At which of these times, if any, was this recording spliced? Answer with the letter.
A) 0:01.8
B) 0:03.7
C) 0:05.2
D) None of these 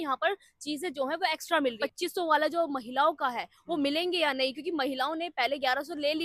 A